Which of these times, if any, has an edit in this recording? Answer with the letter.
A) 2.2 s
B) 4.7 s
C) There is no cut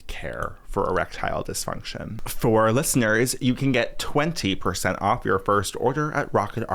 A